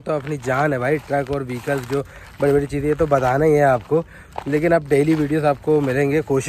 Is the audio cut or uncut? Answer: uncut